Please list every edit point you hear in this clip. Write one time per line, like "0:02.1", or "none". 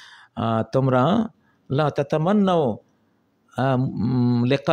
none

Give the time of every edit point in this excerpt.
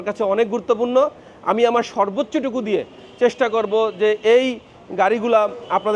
none

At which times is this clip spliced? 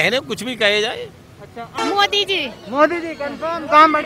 0:01.8

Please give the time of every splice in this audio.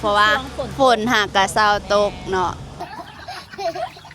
0:02.7

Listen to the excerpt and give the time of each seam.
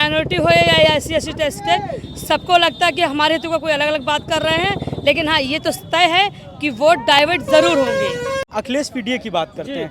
0:08.4

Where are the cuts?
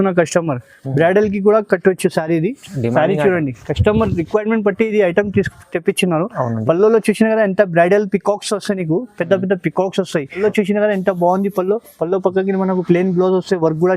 0:10.4

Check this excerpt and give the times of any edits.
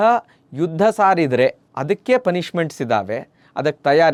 none

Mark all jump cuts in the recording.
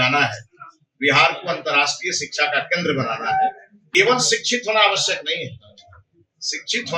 0:03.7

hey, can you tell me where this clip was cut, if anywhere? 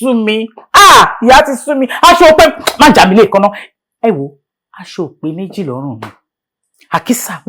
none

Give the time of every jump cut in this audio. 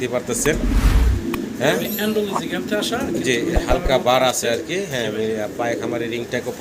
none

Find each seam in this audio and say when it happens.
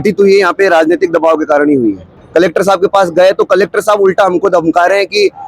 0:02.1

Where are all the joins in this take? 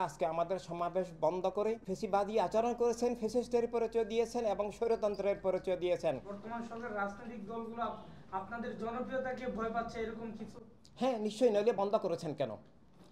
0:01.9
0:06.3

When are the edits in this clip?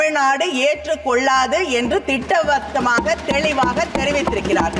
none

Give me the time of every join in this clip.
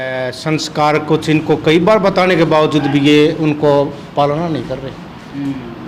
none

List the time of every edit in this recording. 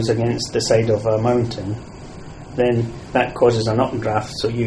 none

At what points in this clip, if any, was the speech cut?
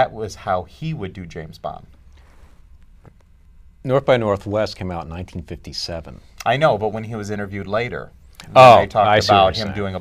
none

